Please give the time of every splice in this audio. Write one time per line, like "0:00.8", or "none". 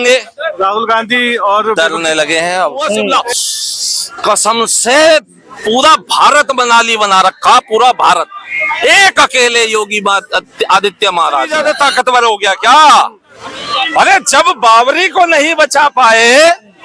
0:03.1
0:11.5